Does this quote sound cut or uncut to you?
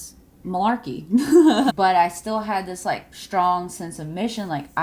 cut